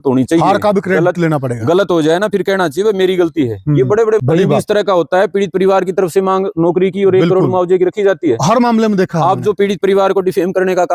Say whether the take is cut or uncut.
cut